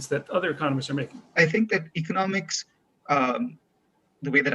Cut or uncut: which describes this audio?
cut